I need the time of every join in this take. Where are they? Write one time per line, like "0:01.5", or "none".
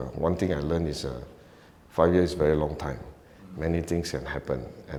none